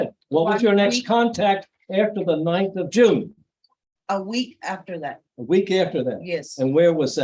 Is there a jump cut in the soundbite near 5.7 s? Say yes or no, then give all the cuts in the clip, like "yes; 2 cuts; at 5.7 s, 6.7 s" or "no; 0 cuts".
no; 0 cuts